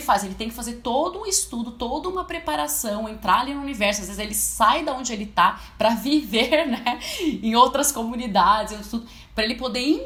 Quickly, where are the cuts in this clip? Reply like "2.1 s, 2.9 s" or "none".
none